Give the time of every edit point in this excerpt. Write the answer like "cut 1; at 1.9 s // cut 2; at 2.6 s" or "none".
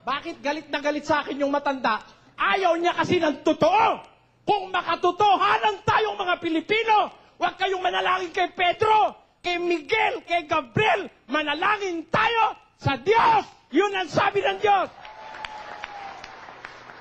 none